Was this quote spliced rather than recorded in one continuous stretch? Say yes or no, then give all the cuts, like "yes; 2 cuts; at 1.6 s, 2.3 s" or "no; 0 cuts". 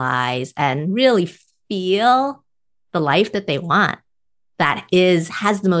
no; 0 cuts